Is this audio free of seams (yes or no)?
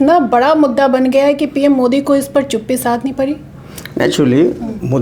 yes